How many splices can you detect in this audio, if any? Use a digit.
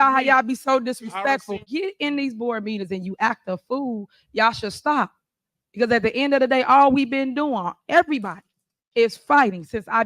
1